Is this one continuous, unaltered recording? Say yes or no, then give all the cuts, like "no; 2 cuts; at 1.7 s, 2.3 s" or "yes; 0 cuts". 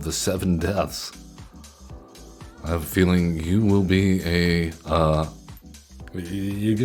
yes; 0 cuts